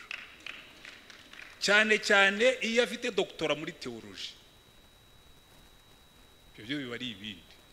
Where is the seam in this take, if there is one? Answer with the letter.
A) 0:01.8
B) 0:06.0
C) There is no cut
C